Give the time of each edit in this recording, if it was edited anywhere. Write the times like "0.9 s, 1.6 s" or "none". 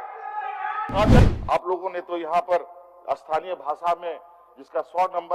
1.2 s